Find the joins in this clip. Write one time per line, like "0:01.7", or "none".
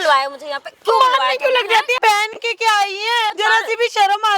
0:01.9
0:03.4